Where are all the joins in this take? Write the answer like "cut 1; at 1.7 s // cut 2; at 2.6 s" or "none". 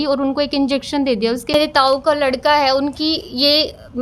cut 1; at 1.5 s